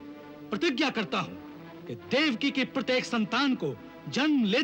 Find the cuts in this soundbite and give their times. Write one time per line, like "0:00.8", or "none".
none